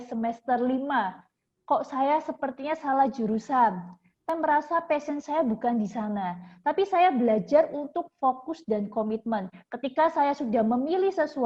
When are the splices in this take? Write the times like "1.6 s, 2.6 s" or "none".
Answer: 4.3 s